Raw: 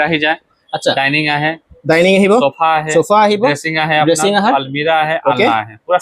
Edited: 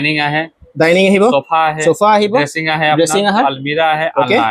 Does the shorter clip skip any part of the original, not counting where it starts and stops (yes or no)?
no